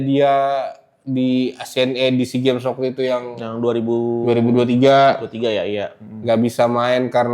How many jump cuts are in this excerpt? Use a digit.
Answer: 0